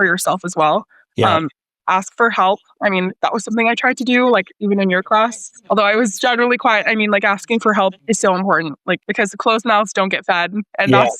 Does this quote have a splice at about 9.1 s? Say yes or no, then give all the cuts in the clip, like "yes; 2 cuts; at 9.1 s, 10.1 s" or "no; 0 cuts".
yes; 2 cuts; at 8.0 s, 9.1 s